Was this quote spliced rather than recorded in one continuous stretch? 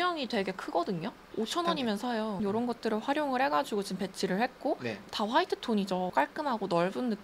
no; 0 cuts

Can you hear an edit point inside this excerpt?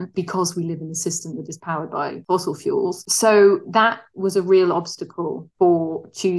no; 0 cuts

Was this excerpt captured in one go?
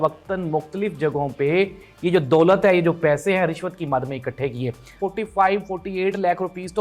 no; 1 cut; at 5.0 s

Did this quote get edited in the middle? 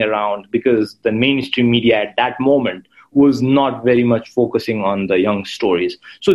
no; 0 cuts

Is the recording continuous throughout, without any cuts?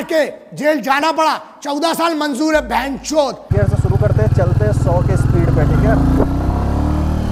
yes; 0 cuts

